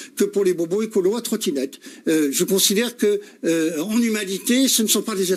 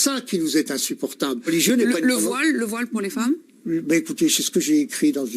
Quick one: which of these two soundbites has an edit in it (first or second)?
second